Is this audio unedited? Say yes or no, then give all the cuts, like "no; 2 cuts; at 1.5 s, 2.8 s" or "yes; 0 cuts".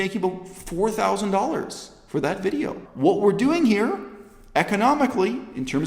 no; 1 cut; at 2.8 s